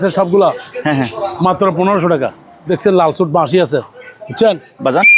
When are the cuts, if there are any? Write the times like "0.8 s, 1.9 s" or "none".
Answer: 2.7 s